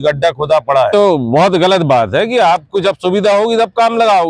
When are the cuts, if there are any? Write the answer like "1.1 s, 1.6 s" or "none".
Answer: 0.9 s